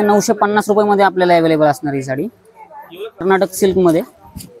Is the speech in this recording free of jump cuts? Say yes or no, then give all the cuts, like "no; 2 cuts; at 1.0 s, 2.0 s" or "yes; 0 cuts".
no; 1 cut; at 3.2 s